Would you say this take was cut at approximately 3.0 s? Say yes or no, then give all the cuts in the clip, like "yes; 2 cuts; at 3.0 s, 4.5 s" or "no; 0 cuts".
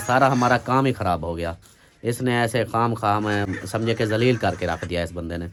no; 0 cuts